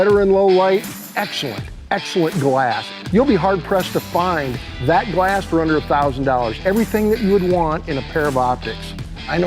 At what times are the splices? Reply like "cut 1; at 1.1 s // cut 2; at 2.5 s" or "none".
cut 1; at 6.5 s